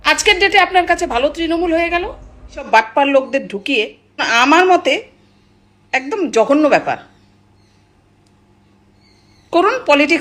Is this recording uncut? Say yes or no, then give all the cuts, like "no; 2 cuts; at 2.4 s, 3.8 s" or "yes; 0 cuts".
no; 1 cut; at 2.7 s